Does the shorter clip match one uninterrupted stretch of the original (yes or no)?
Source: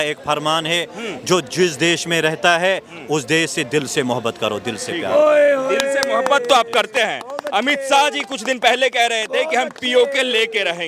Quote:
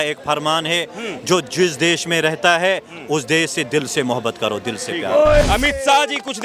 no